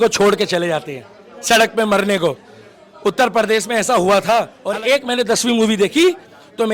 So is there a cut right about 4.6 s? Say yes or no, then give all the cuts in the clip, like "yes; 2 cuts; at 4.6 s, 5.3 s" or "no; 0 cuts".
yes; 1 cut; at 4.6 s